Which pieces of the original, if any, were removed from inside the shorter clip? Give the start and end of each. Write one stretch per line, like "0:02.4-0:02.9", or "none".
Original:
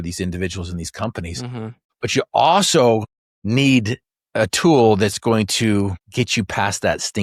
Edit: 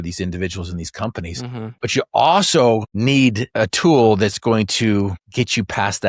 0:01.7-0:01.9
0:03.4-0:04.0

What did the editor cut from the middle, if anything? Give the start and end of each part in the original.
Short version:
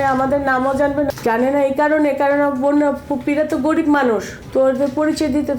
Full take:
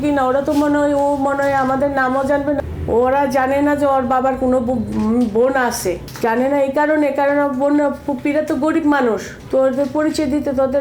0:02.7-0:06.1

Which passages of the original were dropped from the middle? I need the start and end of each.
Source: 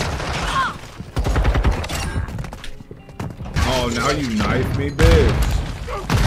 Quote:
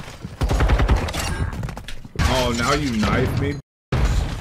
0:02.8-0:03.4

